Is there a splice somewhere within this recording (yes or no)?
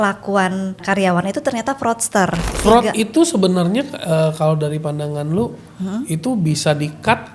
yes